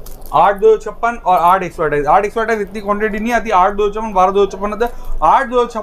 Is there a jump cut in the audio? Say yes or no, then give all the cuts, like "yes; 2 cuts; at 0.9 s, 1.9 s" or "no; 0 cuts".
no; 0 cuts